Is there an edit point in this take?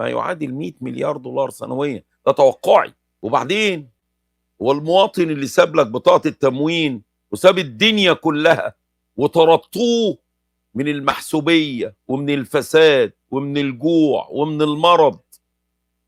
yes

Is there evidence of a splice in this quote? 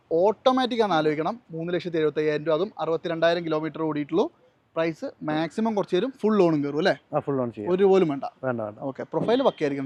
no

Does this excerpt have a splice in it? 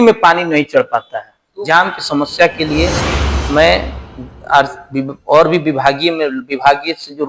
yes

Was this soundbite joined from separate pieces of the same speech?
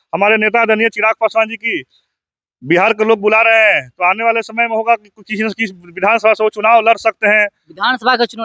no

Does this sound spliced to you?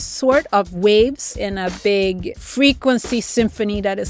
yes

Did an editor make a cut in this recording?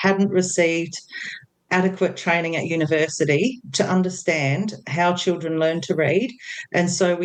no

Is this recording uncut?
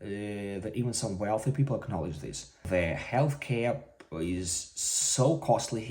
no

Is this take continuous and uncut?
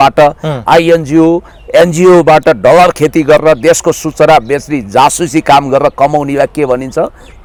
yes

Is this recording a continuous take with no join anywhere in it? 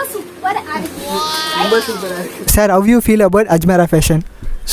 no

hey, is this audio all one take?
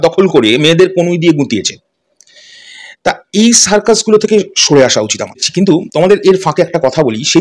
no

